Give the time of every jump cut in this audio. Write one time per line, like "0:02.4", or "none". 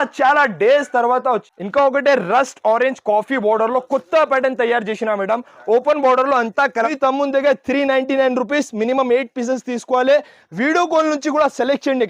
0:01.5
0:06.9